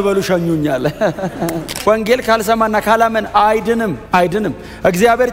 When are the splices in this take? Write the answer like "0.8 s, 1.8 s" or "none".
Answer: 1.7 s